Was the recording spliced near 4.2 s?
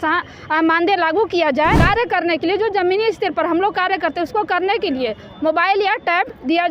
no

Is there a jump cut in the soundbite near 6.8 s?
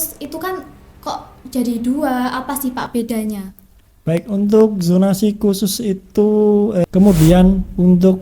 yes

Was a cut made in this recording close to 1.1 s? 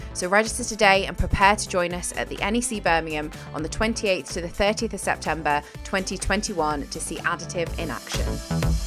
no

